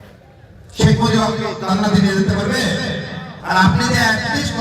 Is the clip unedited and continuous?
no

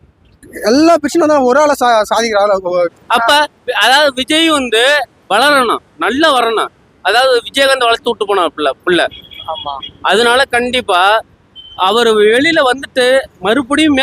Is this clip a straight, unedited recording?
no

